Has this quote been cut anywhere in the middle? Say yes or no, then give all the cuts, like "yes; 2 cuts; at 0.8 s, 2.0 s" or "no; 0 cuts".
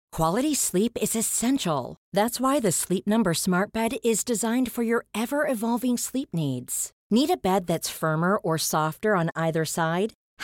no; 0 cuts